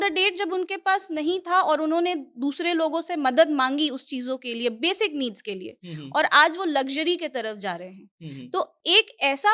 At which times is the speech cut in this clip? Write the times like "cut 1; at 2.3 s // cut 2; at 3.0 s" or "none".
none